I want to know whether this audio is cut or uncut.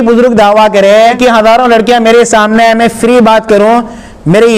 cut